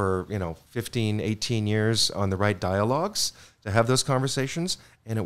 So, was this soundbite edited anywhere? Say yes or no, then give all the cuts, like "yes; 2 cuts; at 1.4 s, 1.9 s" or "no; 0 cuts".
no; 0 cuts